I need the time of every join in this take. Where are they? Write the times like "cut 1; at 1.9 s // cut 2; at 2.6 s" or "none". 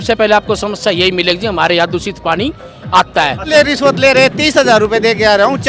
cut 1; at 3.5 s